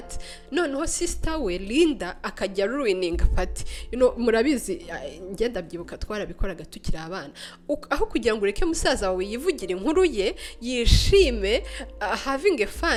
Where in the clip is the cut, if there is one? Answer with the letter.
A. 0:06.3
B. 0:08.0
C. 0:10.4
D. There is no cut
D